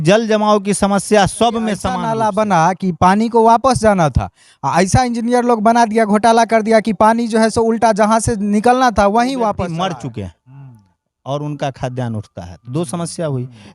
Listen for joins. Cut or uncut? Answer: cut